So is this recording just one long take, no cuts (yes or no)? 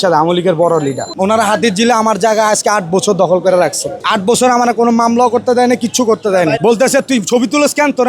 no